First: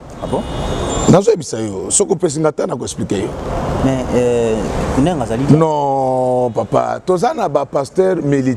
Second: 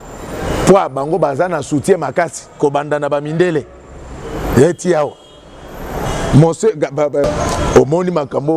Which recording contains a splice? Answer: second; 1 cut; at 7.3 s

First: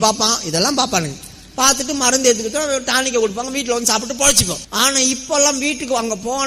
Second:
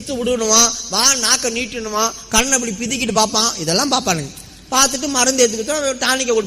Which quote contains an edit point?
first; 1 cut; at 4.6 s

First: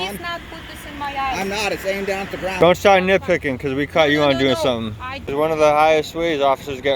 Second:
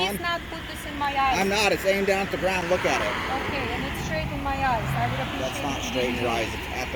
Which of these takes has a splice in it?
first; 2 cuts; at 2.6 s, 5.2 s

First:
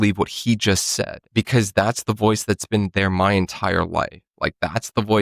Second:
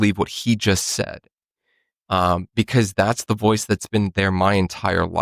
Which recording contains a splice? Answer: first; 1 cut; at 1.2 s

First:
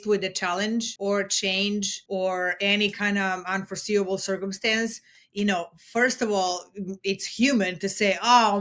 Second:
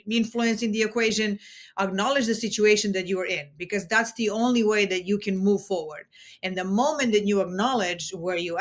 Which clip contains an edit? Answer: first; 2 cuts; at 0.9 s, 2.0 s

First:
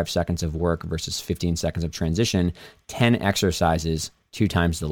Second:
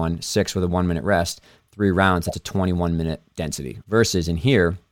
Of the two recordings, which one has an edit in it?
second; 1 cut; at 3.7 s

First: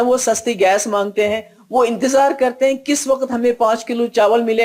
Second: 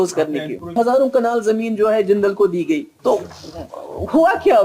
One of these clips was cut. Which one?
second; 2 cuts; at 0.7 s, 2.9 s

